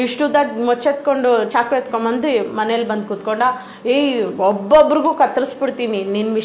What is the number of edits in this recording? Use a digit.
0